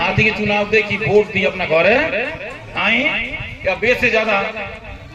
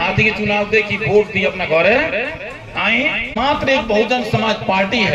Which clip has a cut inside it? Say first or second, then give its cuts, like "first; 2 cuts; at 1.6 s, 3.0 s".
second; 1 cut; at 3.3 s